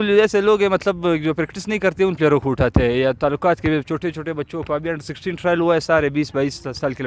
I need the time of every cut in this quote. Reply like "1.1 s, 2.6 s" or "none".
none